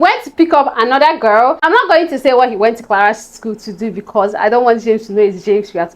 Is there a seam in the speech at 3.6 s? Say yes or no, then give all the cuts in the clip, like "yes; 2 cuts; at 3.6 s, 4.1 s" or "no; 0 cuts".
no; 1 cut; at 1.6 s